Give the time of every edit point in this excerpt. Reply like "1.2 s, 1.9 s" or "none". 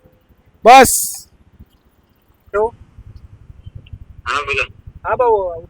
2.5 s